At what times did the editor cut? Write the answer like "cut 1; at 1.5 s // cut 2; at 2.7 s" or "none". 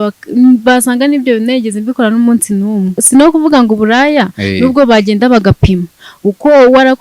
cut 1; at 3.0 s